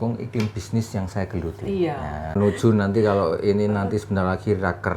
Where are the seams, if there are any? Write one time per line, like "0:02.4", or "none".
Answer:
0:02.3